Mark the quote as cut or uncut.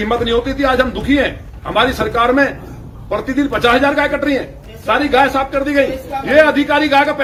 uncut